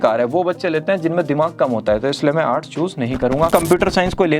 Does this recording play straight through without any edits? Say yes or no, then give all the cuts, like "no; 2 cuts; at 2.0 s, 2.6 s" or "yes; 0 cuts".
no; 1 cut; at 3.5 s